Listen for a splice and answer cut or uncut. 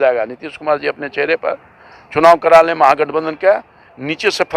uncut